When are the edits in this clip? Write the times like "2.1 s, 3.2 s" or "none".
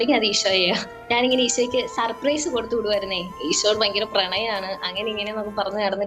0.9 s, 3.3 s